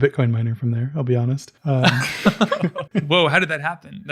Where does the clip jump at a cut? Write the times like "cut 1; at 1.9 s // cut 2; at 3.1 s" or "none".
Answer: cut 1; at 1.5 s // cut 2; at 2.8 s